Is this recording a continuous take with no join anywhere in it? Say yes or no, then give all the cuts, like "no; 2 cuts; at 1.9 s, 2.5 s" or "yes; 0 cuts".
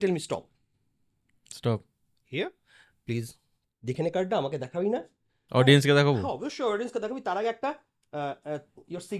yes; 0 cuts